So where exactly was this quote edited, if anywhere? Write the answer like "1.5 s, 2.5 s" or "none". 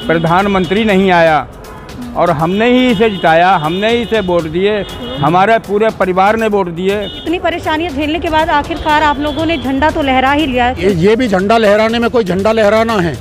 7.1 s, 10.8 s